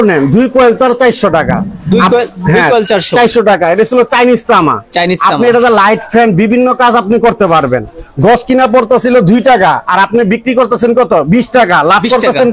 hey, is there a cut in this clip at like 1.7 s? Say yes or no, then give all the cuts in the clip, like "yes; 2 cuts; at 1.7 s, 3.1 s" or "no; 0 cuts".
no; 0 cuts